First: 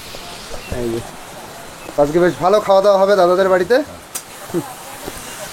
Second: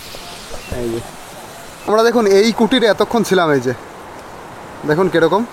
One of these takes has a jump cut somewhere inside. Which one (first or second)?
second